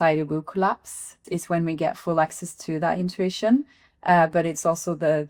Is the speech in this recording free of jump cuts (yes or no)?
no